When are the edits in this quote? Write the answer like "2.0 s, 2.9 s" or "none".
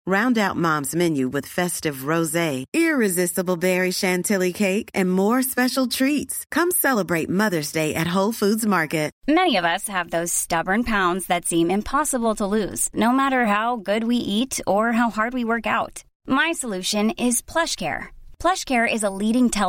9.1 s

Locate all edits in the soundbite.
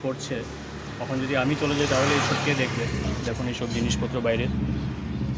none

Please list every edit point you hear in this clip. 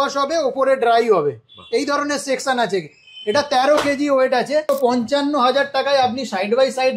4.7 s

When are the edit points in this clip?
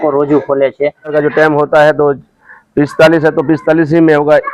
1.1 s

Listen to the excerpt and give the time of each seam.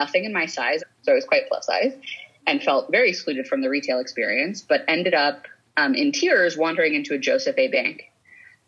0.9 s

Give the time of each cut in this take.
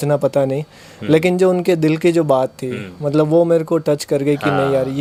none

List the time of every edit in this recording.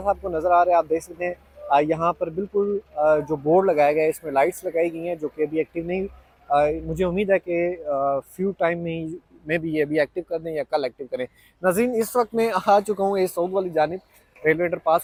none

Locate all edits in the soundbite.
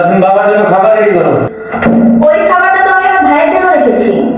1.6 s

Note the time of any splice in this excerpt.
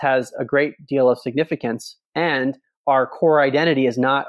none

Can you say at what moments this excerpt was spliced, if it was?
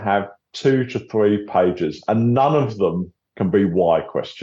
3.1 s

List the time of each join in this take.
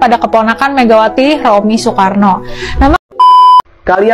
3.0 s

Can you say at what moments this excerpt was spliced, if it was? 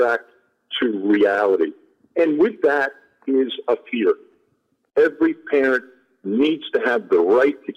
4.9 s

